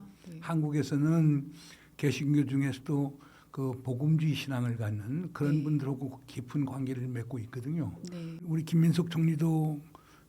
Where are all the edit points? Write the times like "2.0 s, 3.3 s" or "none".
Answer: 8.4 s